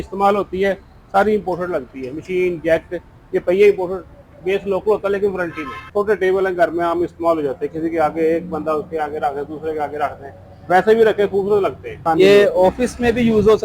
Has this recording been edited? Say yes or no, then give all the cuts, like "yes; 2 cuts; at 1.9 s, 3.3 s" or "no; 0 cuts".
yes; 2 cuts; at 5.7 s, 11.9 s